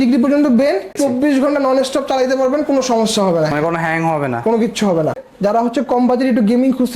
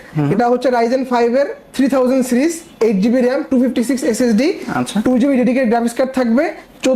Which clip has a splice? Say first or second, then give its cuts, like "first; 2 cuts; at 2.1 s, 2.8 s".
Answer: first; 2 cuts; at 0.9 s, 5.2 s